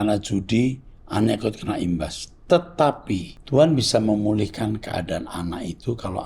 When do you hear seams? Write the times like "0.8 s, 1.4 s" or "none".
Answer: 3.3 s